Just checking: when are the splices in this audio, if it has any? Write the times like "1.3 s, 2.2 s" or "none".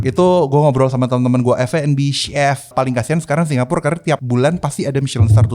2.7 s, 4.2 s